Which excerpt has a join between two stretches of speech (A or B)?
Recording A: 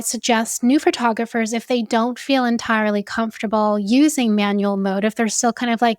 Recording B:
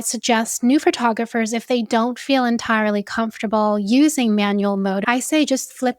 B